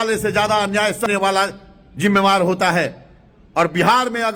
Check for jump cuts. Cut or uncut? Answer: cut